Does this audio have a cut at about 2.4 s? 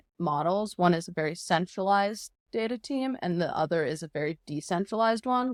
no; 0 cuts

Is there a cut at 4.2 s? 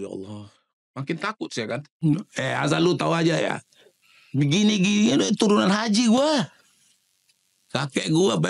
no; 1 cut; at 2.0 s

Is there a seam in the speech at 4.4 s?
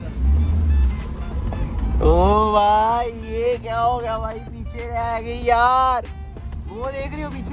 no; 0 cuts

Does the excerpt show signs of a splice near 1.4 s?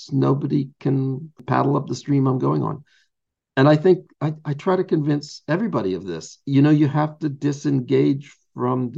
yes; 1 cut; at 1.4 s

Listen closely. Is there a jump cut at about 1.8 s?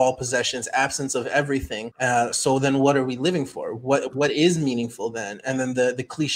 yes; 1 cut; at 1.8 s

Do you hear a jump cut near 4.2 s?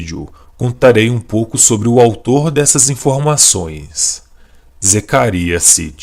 no; 1 cut; at 2.1 s

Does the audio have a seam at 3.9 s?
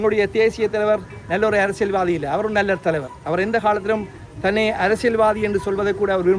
no; 0 cuts

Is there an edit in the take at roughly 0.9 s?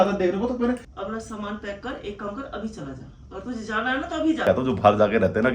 yes; 2 cuts; at 0.9 s, 4.4 s

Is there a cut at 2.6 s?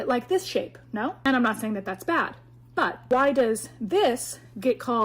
yes; 2 cuts; at 1.2 s, 2.6 s

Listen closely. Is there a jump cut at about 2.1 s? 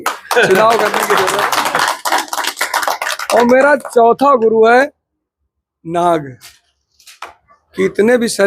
no; 0 cuts

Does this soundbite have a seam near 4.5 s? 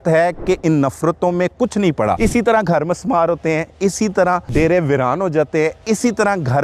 yes; 2 cuts; at 2.2 s, 4.5 s

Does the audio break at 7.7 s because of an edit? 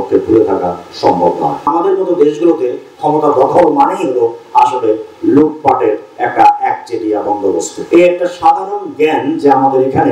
yes; 2 cuts; at 1.7 s, 7.7 s

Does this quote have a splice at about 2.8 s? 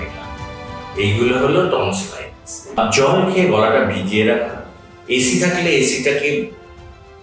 yes; 1 cut; at 2.8 s

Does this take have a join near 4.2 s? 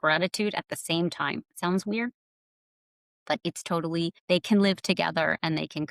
yes; 1 cut; at 4.2 s

